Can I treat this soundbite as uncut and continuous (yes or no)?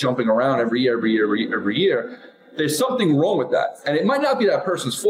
yes